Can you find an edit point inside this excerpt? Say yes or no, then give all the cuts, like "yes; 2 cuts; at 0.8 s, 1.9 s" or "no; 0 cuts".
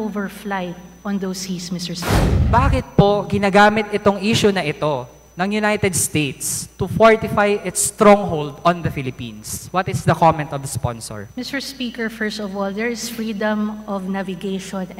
yes; 1 cut; at 2.4 s